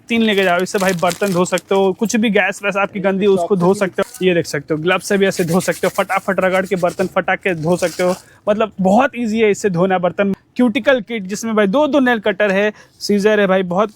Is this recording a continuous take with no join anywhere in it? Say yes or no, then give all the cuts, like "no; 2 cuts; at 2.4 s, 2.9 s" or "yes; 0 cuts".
no; 2 cuts; at 4.0 s, 10.3 s